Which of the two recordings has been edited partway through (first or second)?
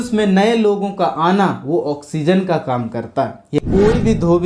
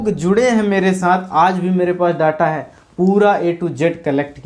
first